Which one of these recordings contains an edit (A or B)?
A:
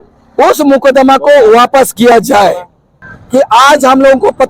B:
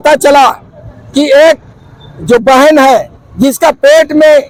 A